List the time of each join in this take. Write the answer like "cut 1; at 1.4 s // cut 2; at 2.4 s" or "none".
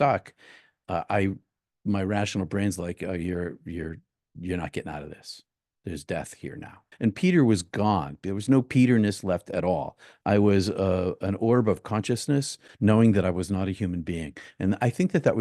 cut 1; at 6.8 s // cut 2; at 12.6 s